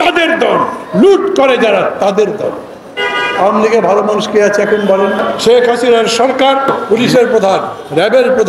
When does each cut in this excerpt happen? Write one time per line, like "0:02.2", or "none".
0:05.3
0:06.8